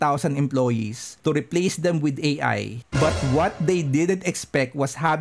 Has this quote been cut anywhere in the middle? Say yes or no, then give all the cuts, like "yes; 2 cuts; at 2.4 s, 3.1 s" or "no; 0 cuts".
yes; 1 cut; at 2.8 s